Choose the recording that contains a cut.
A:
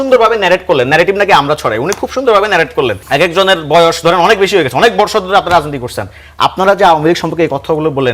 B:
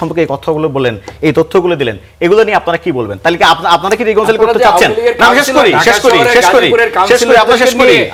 A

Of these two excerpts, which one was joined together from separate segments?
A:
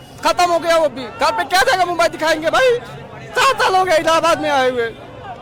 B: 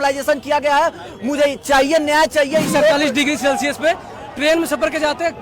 B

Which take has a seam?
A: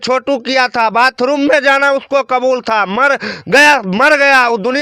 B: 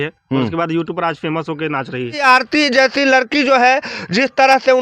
B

